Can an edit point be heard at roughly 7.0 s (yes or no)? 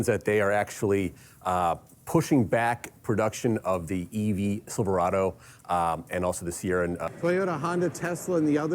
yes